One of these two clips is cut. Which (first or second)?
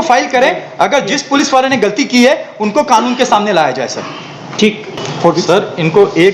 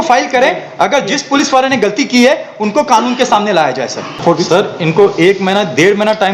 second